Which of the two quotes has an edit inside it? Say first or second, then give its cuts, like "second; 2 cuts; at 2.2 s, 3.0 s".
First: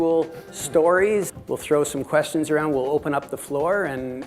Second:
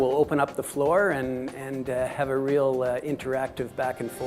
first; 1 cut; at 1.3 s